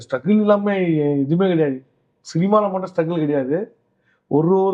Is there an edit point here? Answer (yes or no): no